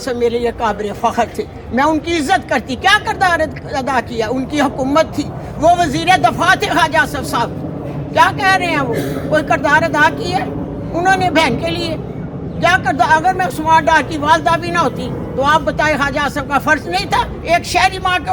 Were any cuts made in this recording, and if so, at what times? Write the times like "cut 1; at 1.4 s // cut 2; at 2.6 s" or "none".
none